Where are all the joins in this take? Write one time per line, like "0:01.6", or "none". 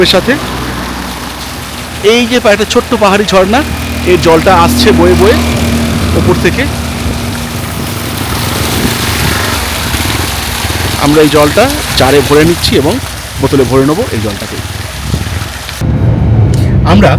none